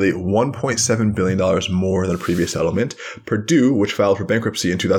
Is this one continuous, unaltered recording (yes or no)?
yes